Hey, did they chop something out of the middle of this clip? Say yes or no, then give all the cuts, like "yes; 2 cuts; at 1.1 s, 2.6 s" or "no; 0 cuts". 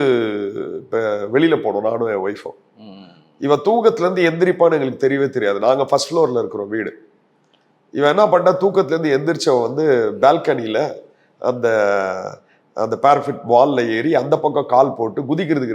no; 0 cuts